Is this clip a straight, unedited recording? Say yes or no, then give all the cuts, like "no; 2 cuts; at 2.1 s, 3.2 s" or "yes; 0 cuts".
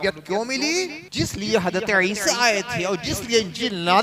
no; 1 cut; at 1.0 s